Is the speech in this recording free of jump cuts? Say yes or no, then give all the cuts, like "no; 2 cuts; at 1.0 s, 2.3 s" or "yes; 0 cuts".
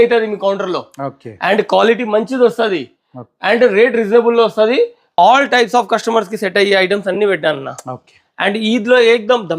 no; 1 cut; at 5.0 s